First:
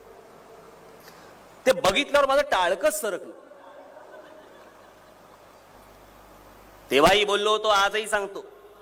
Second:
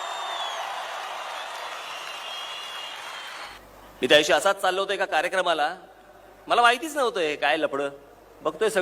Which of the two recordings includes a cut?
second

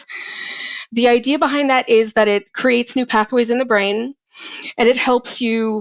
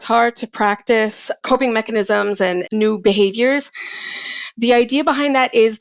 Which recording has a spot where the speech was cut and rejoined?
second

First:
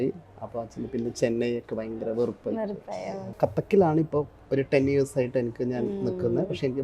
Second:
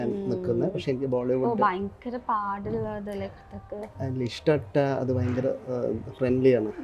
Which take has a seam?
first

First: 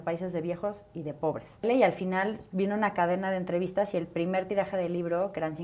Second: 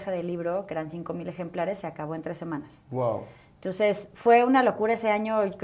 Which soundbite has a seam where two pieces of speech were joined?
first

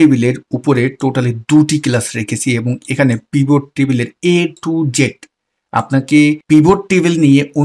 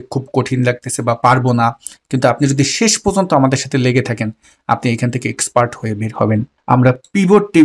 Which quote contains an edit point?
second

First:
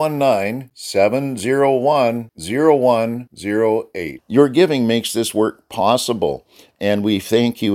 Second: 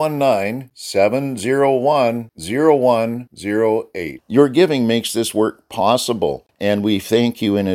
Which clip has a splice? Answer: second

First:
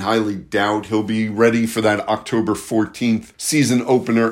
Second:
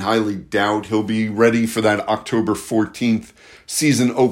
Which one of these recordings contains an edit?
first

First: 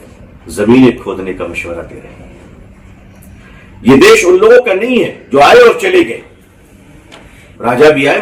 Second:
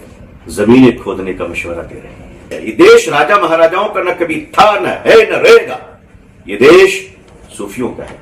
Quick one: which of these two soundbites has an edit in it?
second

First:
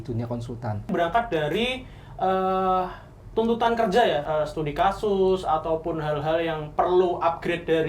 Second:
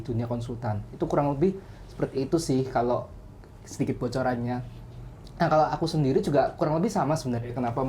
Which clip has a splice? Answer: first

